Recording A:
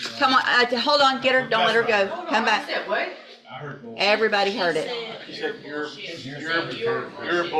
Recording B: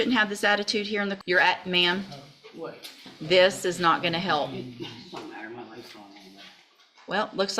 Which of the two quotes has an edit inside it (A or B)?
B